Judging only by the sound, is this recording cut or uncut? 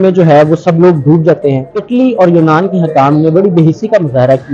cut